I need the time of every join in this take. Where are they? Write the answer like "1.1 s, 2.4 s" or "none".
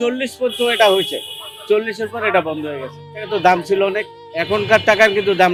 none

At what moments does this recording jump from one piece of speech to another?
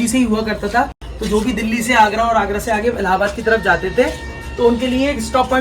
none

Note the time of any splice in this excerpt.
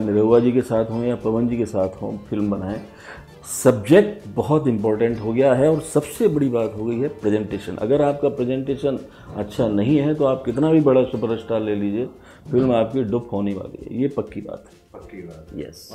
none

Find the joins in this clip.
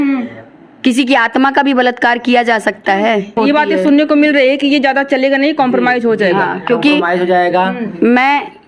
3.3 s

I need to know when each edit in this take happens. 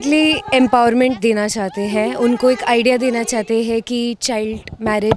none

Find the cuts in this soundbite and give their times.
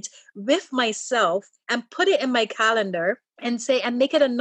3.3 s

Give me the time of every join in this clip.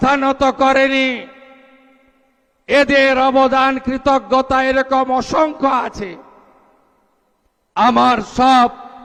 none

